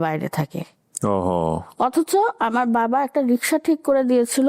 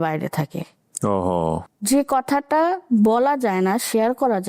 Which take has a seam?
second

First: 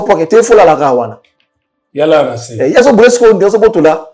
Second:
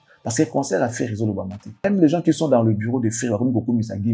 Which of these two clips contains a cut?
second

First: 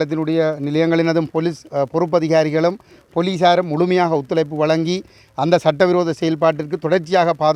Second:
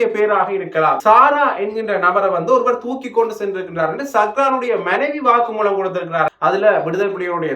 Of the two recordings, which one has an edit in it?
second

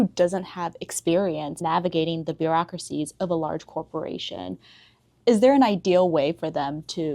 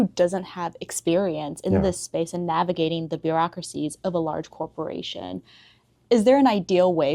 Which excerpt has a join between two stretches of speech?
first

